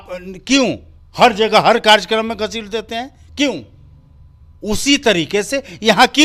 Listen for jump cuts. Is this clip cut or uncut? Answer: uncut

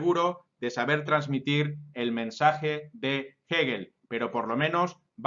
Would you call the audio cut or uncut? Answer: cut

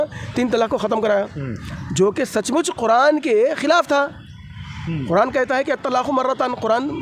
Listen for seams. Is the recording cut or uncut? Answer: uncut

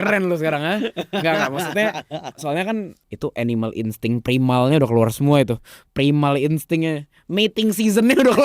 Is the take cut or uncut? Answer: cut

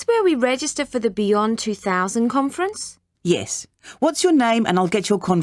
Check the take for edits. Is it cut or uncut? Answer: uncut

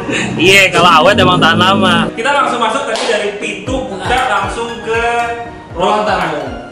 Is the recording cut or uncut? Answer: cut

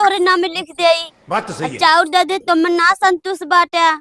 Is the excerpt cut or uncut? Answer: uncut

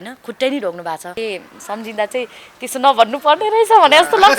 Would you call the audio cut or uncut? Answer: cut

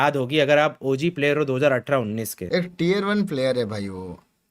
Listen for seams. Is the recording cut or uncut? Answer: cut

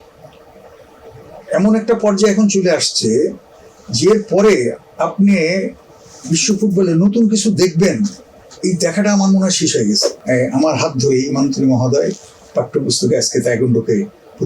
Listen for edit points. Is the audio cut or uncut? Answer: cut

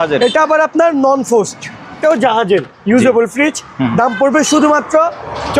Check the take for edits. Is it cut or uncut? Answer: cut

